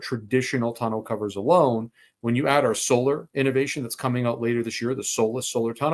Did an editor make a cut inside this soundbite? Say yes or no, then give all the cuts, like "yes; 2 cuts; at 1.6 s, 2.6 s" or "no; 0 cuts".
no; 0 cuts